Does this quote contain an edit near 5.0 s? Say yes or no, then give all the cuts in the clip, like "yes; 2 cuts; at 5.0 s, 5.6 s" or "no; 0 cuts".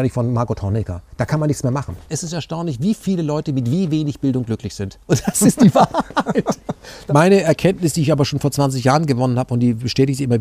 no; 2 cuts; at 2.1 s, 6.9 s